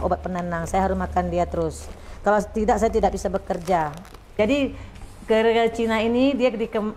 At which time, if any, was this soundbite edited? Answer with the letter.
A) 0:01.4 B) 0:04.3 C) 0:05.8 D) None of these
B